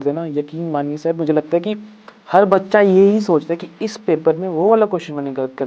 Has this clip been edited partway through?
no; 0 cuts

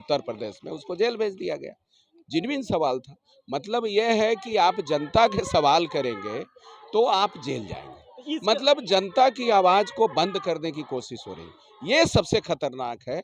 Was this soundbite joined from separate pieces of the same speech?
no; 0 cuts

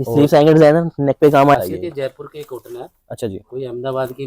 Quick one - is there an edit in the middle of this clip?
yes; 1 cut; at 1.6 s

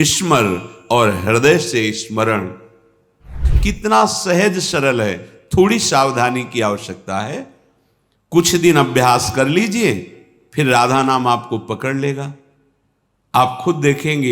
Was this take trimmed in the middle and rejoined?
yes; 1 cut; at 3.4 s

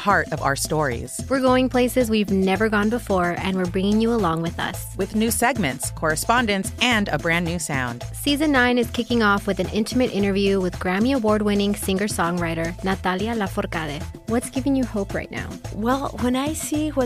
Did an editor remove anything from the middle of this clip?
no; 0 cuts

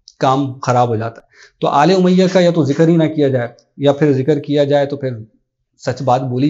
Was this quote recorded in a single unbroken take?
yes; 0 cuts

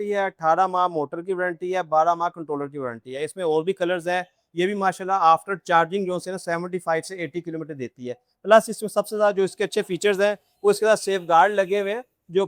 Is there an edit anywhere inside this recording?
no; 0 cuts

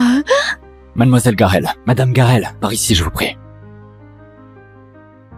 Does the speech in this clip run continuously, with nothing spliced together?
yes; 0 cuts

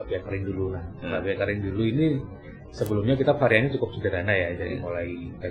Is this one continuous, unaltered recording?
yes; 0 cuts

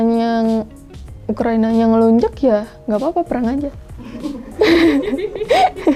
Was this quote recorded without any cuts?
yes; 0 cuts

